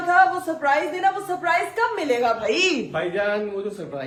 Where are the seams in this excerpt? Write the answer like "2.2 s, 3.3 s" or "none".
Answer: none